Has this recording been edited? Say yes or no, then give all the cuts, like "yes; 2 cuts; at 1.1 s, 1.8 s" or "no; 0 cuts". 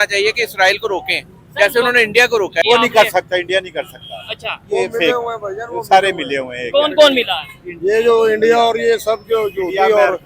yes; 1 cut; at 2.6 s